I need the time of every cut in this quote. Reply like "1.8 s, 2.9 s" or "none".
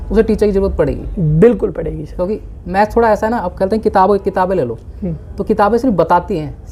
none